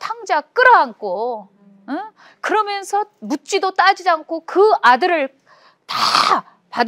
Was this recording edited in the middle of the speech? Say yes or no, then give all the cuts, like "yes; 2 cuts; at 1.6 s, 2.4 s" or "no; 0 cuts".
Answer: no; 0 cuts